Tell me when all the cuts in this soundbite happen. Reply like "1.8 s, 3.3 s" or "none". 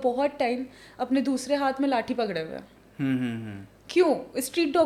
none